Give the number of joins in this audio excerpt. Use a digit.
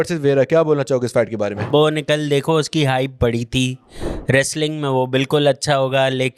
1